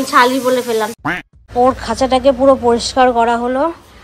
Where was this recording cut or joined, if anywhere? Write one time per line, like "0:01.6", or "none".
0:00.9